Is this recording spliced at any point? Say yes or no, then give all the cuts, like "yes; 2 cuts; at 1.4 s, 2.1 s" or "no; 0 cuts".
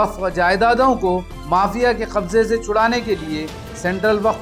no; 0 cuts